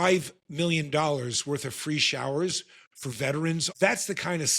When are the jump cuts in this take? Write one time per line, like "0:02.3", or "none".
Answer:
0:03.7